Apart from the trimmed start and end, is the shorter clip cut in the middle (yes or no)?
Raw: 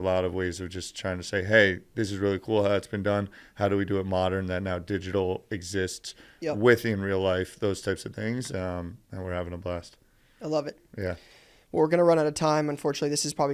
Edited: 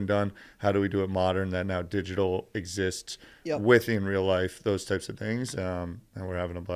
no